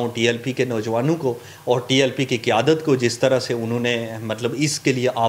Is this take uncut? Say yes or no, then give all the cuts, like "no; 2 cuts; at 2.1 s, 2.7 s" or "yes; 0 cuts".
yes; 0 cuts